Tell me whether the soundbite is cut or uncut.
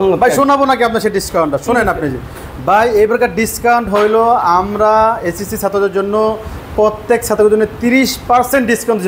uncut